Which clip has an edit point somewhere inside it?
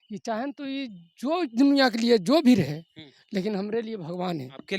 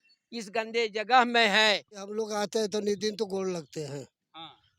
second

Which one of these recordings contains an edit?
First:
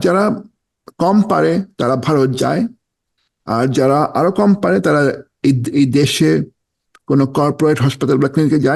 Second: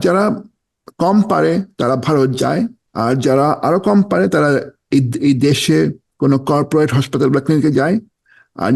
second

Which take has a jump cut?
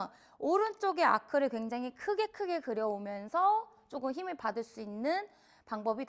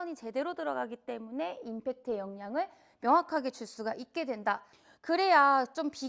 second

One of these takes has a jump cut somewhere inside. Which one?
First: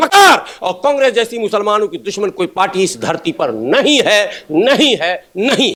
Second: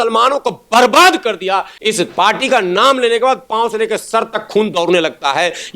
second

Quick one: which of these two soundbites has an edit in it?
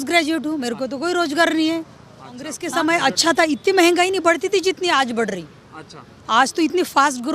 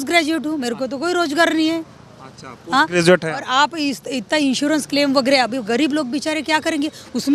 first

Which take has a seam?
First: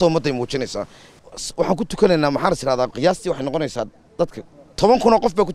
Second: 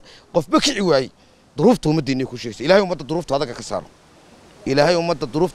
first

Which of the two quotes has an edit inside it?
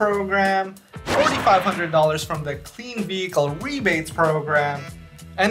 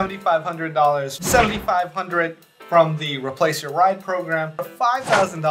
second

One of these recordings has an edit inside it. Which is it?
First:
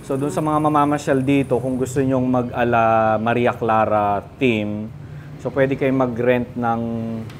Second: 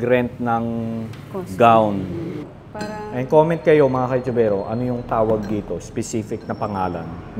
second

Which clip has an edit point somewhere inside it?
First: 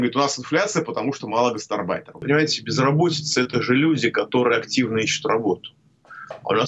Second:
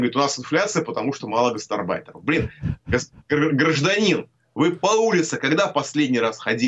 first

